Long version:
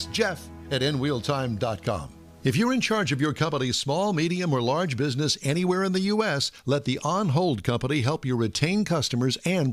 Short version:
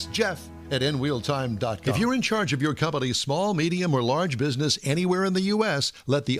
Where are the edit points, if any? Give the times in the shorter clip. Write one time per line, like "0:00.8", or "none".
0:01.8